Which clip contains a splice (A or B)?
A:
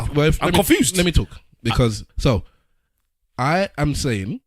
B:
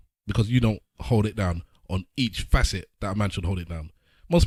A